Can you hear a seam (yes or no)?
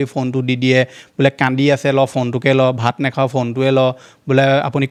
no